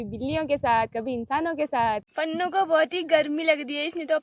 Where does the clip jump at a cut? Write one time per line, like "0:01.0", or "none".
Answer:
0:02.1